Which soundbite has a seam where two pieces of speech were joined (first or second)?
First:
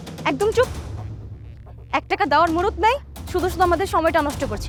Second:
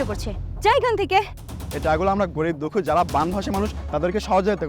second